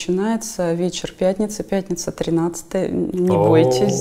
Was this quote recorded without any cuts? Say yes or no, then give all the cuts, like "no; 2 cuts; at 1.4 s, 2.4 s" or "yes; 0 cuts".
yes; 0 cuts